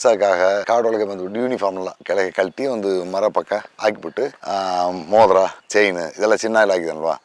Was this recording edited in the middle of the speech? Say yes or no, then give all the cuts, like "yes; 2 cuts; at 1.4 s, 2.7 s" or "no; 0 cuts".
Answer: no; 0 cuts